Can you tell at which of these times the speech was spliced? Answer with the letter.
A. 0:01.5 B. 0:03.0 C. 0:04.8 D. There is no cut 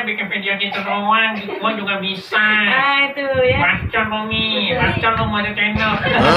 C